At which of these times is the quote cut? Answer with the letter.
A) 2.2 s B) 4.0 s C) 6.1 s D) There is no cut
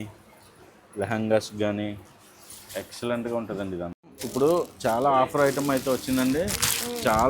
B